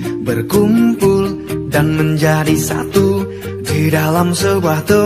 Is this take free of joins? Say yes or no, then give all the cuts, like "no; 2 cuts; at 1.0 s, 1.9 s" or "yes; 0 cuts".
yes; 0 cuts